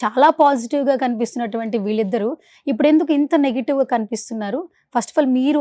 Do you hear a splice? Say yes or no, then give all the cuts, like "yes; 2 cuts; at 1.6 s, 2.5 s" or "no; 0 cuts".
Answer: no; 0 cuts